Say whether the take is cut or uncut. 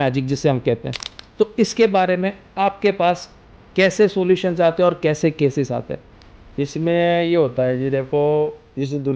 uncut